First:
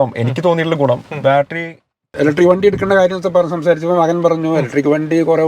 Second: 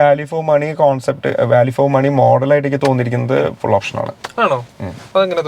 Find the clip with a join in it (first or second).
first